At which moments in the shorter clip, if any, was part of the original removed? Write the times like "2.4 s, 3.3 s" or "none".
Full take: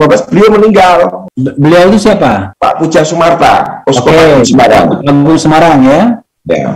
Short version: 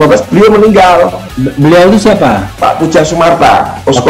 none